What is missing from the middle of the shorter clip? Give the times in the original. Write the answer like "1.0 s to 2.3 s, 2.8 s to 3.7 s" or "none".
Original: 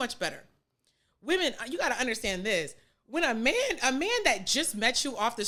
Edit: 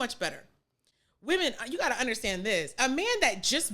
2.7 s to 3.8 s

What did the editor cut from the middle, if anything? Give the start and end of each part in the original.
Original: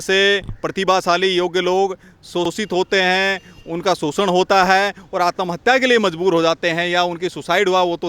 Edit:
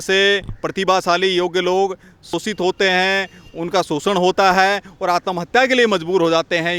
2.3 s to 2.4 s

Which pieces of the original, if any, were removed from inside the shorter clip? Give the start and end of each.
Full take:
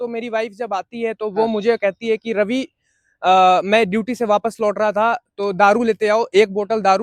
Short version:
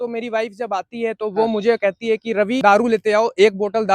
2.6 s to 5.6 s

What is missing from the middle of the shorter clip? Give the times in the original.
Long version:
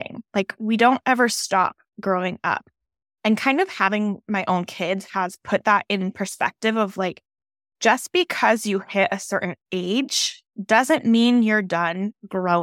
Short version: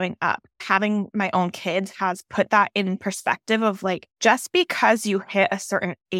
3.2 s to 4.1 s, 7.2 s to 7.7 s

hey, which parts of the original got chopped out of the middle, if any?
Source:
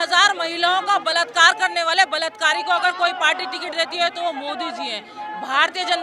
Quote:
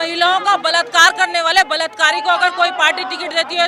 none

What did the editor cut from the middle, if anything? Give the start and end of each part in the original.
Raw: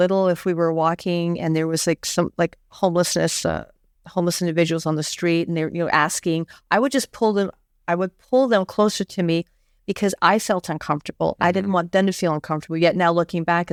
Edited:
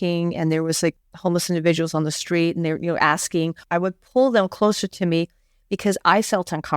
2.1 s to 3.9 s, 6.5 s to 7.8 s

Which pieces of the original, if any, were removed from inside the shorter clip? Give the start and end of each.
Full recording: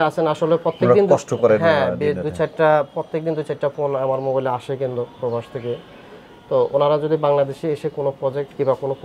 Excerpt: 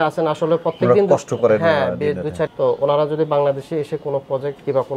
2.5 s to 6.4 s

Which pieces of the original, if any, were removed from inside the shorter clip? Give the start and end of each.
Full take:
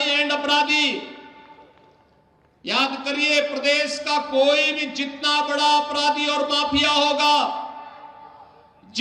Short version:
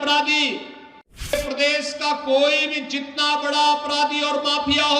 1.7 s to 3.4 s

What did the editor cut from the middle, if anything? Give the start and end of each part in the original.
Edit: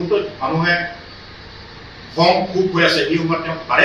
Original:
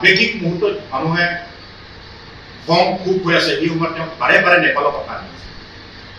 none

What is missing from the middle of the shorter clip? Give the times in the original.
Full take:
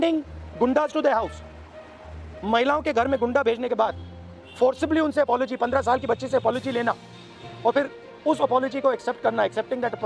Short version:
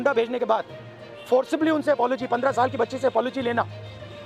none

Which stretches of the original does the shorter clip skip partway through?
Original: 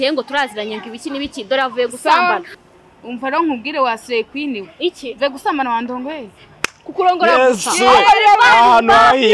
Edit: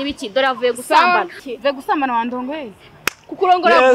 2.6 s to 5.0 s

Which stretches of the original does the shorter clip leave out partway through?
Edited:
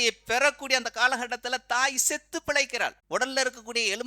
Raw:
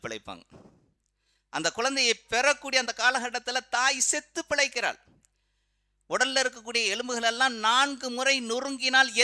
5.0 s to 6.0 s

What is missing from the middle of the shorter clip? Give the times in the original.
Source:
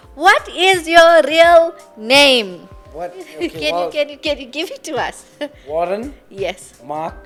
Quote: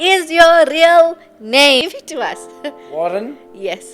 2.4 s to 4.6 s

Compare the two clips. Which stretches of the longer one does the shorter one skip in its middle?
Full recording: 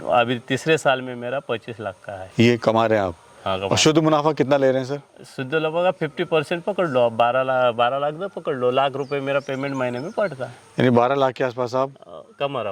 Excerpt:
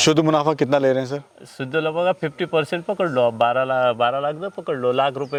none

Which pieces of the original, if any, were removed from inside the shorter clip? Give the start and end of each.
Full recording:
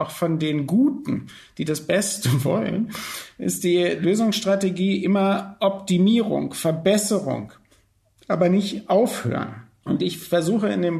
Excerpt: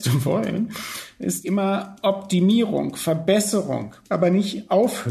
3.6 s to 5.0 s, 7.5 s to 8.1 s

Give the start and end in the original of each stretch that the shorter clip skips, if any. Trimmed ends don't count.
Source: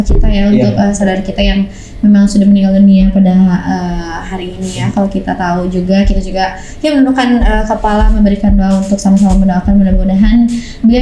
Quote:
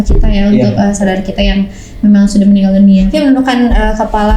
3.1 s to 6.8 s

